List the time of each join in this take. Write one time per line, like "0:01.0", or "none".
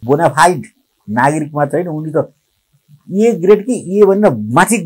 none